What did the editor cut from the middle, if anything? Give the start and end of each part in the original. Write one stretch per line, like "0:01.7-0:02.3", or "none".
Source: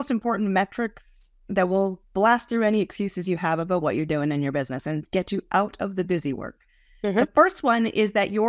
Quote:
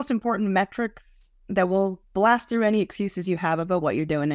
none